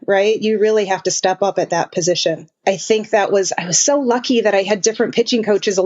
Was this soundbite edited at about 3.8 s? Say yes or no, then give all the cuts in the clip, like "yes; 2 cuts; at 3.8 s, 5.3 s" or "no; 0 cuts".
no; 1 cut; at 2.5 s